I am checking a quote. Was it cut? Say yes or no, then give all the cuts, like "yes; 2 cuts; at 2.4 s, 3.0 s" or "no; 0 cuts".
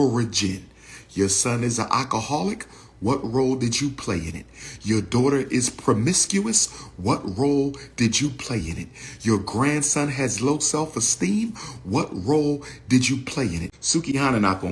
yes; 1 cut; at 13.7 s